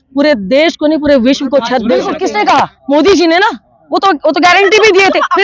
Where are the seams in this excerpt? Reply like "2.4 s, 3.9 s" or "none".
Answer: 2.1 s